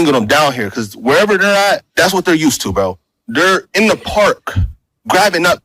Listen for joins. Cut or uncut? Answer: cut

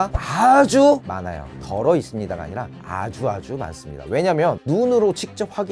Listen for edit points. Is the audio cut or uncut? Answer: cut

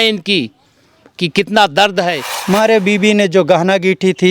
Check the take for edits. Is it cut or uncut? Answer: cut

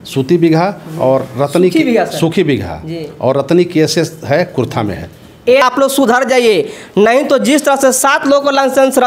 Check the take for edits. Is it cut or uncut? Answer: cut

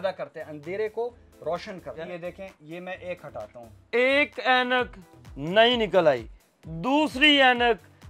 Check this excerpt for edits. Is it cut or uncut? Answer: cut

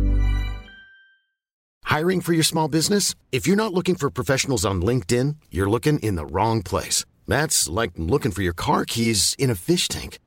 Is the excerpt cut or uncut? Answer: cut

